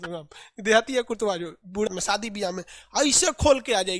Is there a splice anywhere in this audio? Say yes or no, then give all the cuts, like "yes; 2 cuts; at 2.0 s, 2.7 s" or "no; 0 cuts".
yes; 1 cut; at 1.9 s